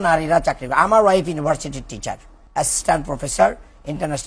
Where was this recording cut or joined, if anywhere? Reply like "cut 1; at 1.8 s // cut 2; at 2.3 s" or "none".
cut 1; at 2.3 s